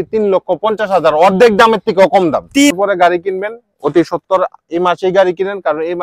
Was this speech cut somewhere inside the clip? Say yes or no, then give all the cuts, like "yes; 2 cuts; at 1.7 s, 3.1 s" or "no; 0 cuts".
yes; 1 cut; at 2.7 s